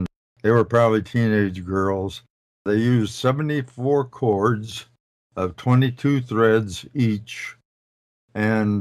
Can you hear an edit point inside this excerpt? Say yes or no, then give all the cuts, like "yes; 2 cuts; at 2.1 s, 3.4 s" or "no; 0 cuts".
yes; 1 cut; at 2.1 s